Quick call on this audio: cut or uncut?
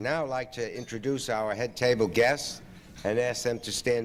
uncut